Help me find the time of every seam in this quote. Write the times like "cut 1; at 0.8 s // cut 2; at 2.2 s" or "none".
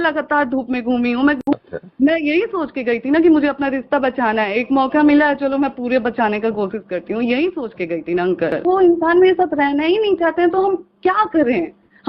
cut 1; at 1.4 s // cut 2; at 8.6 s